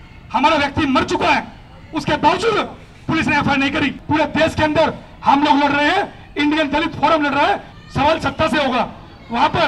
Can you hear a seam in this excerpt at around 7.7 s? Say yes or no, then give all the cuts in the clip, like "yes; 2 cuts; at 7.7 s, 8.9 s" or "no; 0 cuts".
yes; 2 cuts; at 4.0 s, 7.7 s